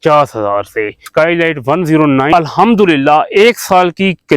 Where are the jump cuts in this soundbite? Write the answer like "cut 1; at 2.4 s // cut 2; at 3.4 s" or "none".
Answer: cut 1; at 1.0 s // cut 2; at 2.3 s